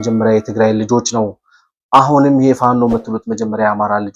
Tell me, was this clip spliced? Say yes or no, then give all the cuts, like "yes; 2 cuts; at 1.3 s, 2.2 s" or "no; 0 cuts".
no; 0 cuts